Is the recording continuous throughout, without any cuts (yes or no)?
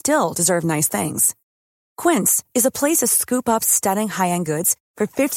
yes